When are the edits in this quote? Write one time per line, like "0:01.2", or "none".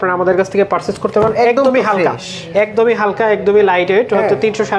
none